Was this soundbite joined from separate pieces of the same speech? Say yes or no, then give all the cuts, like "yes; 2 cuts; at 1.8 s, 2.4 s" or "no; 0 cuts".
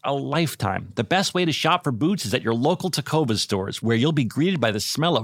no; 0 cuts